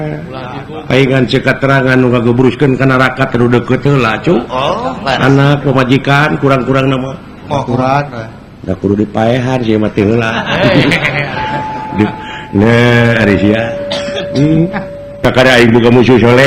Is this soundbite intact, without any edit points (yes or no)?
no